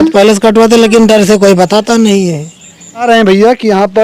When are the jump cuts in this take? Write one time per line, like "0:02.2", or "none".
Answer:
0:03.0